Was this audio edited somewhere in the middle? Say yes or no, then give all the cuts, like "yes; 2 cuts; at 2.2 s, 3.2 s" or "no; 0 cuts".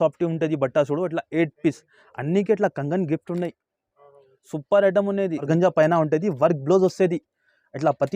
yes; 1 cut; at 5.5 s